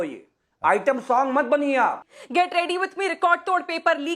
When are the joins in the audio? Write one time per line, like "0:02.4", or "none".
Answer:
0:02.1